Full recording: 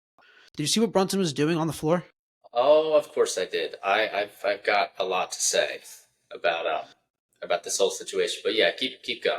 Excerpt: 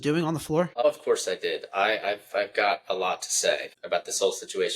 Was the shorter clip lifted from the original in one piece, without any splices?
no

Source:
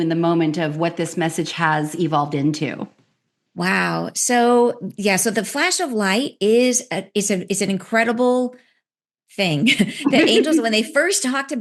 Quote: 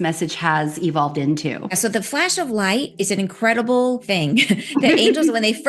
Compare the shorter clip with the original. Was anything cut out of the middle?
yes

